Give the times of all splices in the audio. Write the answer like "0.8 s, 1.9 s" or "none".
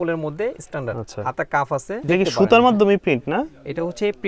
2.0 s